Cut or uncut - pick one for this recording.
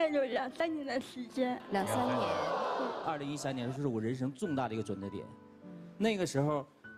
cut